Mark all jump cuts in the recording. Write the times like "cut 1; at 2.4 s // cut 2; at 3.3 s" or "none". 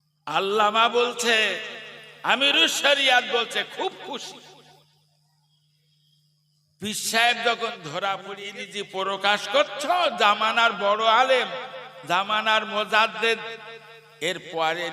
cut 1; at 8.4 s